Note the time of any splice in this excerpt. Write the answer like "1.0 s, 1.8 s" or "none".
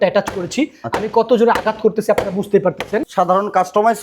3.1 s